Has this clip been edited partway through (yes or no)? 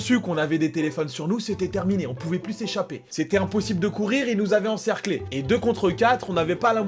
no